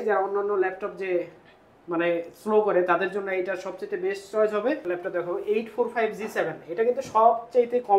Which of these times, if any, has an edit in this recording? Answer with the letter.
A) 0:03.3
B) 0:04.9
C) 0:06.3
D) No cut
B